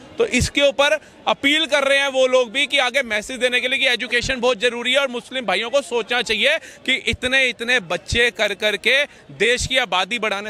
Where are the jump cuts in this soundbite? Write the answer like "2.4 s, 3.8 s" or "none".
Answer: none